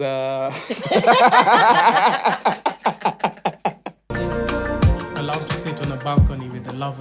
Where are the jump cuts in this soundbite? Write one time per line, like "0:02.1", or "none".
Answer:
0:04.1